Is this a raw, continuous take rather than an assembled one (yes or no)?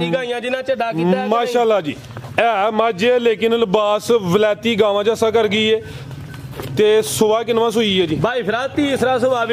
yes